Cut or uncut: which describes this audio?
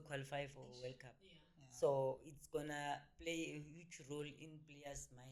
uncut